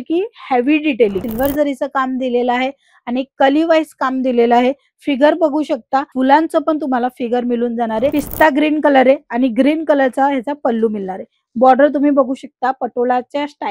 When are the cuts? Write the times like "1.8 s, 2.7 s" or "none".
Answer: 1.2 s, 8.1 s